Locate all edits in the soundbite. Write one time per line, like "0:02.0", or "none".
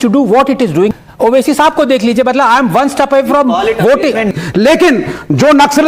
0:00.9
0:04.3